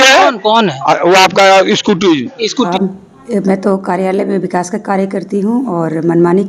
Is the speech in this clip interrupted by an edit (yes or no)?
yes